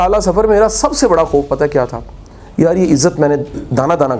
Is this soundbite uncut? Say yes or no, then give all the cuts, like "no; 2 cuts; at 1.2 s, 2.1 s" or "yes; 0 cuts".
yes; 0 cuts